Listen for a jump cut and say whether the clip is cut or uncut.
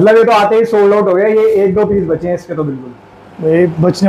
uncut